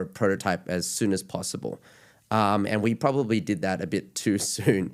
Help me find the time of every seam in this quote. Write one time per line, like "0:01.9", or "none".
none

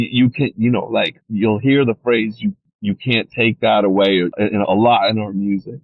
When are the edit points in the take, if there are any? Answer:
0:01.2
0:02.6
0:04.3

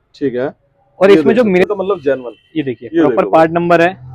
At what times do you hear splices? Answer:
0:01.6

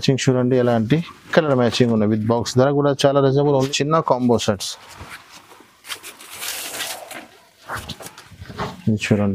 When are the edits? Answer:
0:03.7

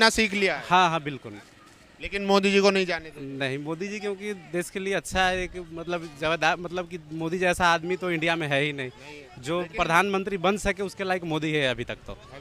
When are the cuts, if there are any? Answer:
none

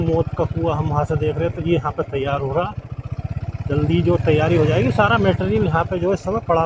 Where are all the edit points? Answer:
none

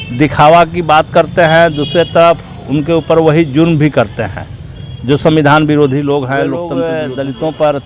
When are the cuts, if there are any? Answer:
0:06.7

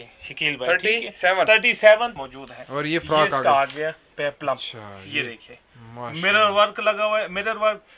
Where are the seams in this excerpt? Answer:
0:02.2

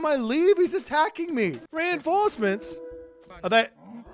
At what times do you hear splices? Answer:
0:01.7

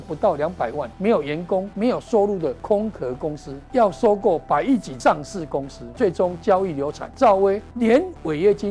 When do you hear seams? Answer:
0:00.9
0:01.7
0:02.6
0:03.5
0:04.9
0:05.8
0:07.0
0:07.7

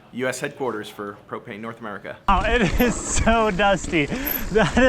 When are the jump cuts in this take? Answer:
0:02.1

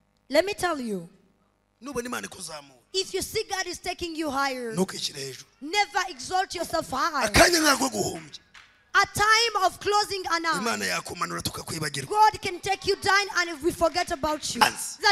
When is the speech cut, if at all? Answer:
none

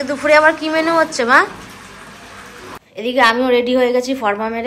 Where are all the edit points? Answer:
0:02.8

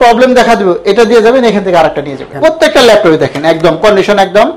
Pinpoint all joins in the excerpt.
0:02.2

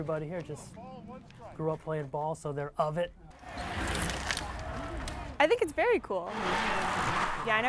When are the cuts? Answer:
0:03.6

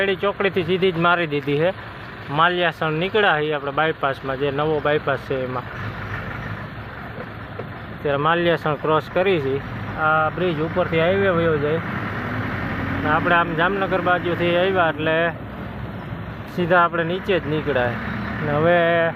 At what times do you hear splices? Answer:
none

